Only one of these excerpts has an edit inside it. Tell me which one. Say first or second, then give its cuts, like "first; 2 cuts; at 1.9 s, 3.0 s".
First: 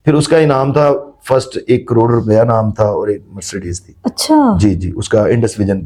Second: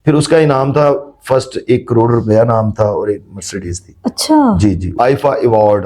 second; 1 cut; at 4.9 s